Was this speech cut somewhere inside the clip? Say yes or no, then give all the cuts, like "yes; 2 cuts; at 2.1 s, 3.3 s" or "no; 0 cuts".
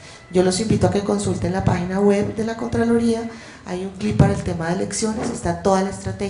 yes; 1 cut; at 1.0 s